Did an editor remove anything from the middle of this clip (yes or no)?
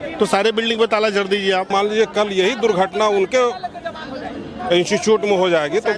yes